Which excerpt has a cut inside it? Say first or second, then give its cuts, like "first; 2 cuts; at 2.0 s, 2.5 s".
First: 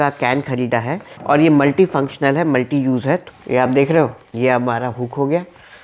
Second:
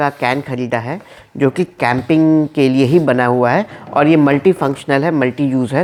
first; 2 cuts; at 1.1 s, 3.3 s